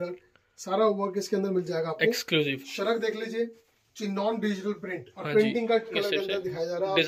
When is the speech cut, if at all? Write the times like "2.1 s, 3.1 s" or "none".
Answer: 6.0 s